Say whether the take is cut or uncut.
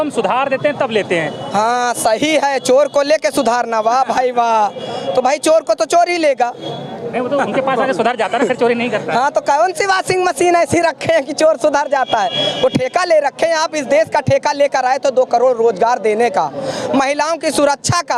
uncut